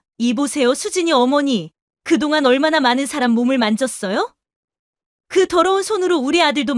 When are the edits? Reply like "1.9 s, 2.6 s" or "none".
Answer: none